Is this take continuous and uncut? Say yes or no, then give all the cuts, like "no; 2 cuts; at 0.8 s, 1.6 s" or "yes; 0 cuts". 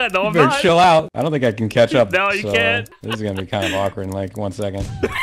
no; 2 cuts; at 1.1 s, 3.0 s